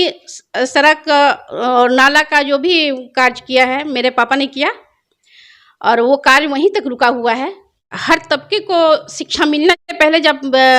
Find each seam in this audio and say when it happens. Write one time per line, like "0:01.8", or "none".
0:07.9
0:09.9